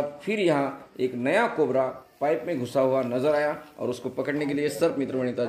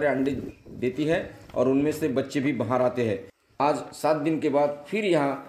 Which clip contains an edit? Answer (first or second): second